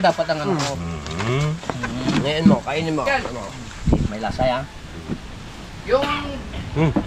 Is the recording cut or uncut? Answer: uncut